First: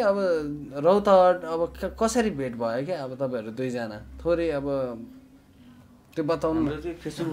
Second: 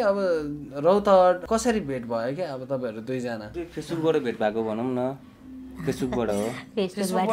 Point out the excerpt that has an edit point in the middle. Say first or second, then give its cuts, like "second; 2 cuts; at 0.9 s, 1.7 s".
second; 2 cuts; at 1.4 s, 3.6 s